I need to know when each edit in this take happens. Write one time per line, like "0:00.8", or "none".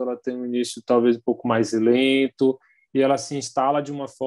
none